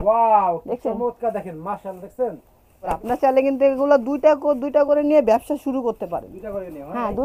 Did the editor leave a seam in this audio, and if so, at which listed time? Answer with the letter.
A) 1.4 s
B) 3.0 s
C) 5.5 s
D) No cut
B